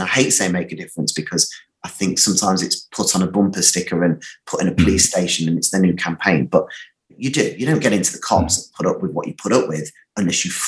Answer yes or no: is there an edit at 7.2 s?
yes